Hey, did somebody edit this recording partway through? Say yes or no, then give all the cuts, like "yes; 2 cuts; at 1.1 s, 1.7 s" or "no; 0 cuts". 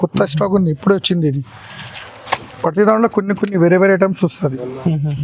no; 0 cuts